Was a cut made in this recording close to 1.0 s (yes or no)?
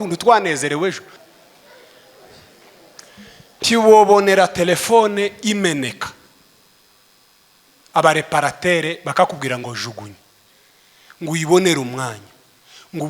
yes